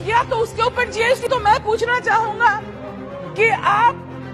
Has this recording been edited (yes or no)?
yes